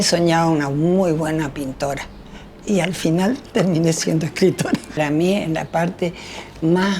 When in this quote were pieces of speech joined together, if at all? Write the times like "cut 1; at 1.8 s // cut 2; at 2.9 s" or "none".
cut 1; at 5.0 s